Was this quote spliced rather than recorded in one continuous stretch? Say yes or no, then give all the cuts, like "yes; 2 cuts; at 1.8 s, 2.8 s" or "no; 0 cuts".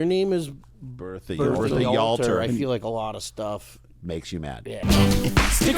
yes; 1 cut; at 4.8 s